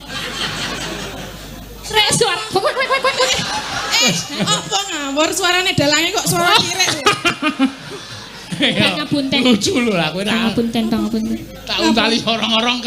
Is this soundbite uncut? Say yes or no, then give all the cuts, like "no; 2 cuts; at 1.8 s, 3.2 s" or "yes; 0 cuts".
no; 1 cut; at 1.9 s